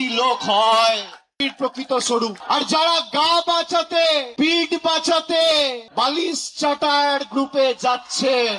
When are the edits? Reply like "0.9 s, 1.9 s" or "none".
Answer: 1.4 s, 2.4 s, 4.3 s, 5.8 s